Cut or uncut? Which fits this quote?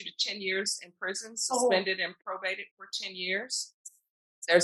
uncut